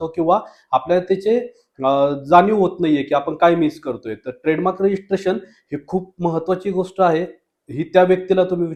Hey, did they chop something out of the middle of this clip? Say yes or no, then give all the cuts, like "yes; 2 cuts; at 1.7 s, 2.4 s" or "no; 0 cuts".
no; 0 cuts